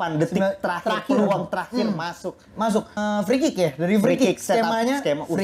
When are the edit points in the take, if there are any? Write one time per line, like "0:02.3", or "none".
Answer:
0:03.0

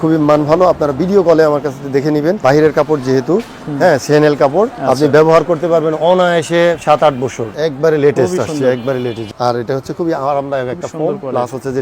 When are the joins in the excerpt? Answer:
0:02.4
0:04.8
0:07.5
0:09.2

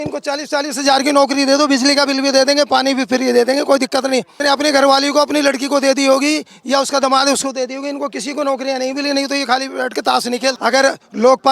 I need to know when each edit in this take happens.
0:04.3
0:10.6

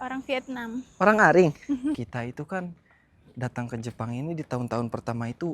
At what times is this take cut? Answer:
0:02.0

